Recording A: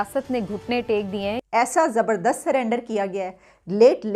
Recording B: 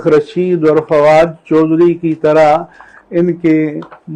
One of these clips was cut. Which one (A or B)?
A